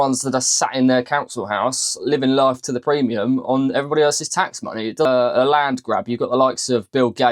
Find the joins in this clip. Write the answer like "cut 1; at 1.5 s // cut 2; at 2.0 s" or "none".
cut 1; at 5.1 s